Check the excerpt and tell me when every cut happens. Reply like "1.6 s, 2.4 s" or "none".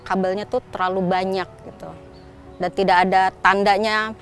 none